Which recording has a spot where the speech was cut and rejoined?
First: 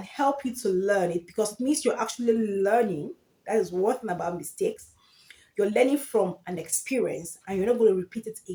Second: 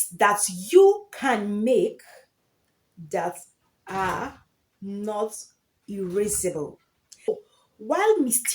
second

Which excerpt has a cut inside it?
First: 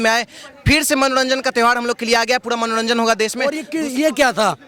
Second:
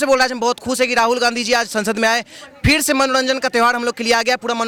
first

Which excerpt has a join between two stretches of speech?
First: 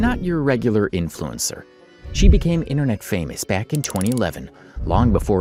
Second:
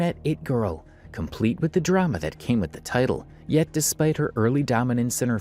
second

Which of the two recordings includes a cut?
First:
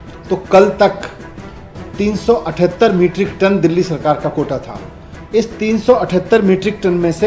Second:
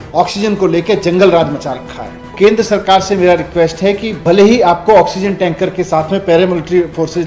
second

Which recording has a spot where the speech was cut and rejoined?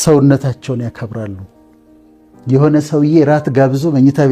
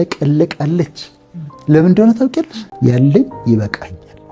second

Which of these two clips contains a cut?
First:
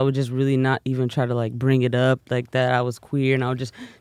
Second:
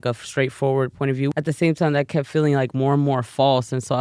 second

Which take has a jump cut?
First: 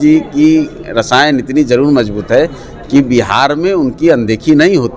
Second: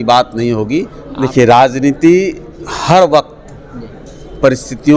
second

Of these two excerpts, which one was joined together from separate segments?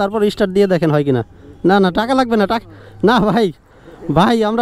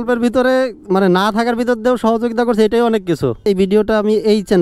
second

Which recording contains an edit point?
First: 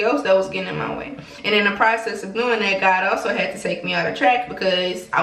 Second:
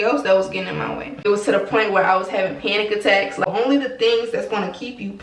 second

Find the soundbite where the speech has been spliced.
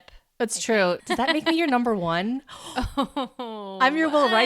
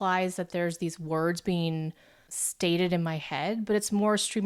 first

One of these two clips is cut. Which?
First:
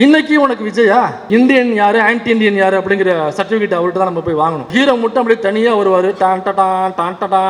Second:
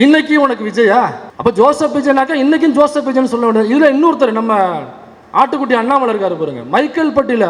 first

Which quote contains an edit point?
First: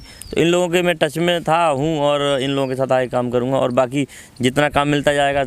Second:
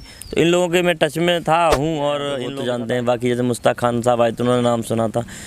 second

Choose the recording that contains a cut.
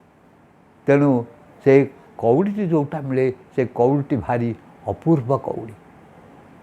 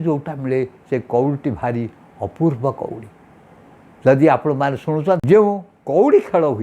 second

